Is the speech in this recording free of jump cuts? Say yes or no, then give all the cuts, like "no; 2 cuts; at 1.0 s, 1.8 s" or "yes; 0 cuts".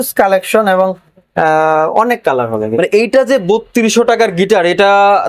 yes; 0 cuts